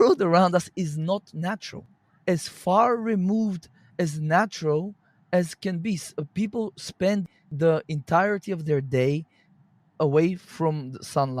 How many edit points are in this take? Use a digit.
2